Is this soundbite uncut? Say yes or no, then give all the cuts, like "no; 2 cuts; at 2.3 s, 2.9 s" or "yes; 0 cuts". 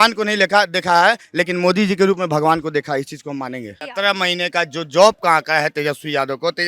no; 1 cut; at 3.9 s